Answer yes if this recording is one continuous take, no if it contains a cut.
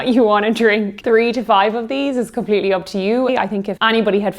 no